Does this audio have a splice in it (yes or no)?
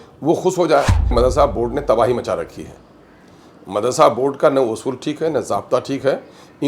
yes